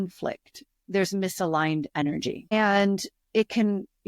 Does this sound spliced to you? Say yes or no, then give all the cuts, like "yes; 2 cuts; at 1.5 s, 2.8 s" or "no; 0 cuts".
yes; 1 cut; at 2.5 s